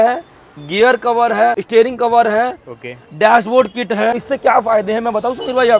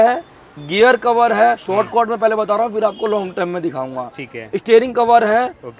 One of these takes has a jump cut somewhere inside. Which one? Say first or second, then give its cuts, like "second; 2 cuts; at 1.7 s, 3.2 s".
first; 2 cuts; at 1.6 s, 4.2 s